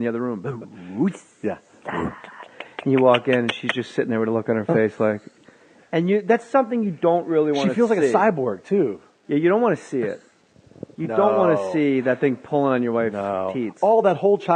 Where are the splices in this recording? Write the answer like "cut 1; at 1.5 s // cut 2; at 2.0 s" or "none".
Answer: cut 1; at 11.9 s